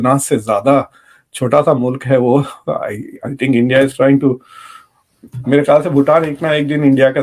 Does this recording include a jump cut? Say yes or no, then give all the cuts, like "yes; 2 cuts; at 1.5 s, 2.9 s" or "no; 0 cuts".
no; 0 cuts